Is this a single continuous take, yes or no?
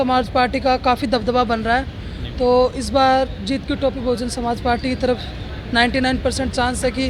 yes